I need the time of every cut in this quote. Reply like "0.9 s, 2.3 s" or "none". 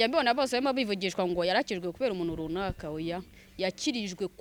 none